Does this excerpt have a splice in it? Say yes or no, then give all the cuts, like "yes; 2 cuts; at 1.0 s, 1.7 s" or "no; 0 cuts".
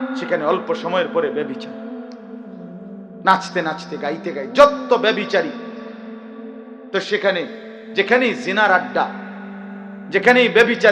yes; 2 cuts; at 1.7 s, 3.2 s